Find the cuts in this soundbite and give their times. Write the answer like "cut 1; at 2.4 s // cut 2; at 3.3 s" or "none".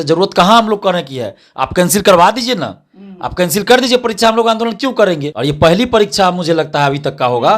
cut 1; at 5.3 s